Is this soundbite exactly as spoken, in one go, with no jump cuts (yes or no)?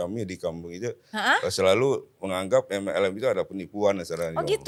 yes